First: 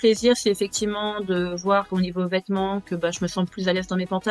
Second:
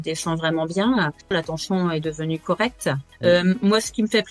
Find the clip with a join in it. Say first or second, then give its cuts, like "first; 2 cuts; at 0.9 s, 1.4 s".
second; 2 cuts; at 1.3 s, 3.1 s